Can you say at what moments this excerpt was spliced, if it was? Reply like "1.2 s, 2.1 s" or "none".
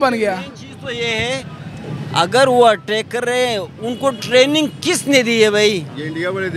none